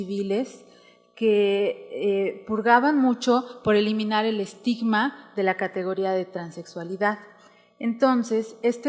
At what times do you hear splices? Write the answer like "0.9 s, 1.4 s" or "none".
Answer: 3.0 s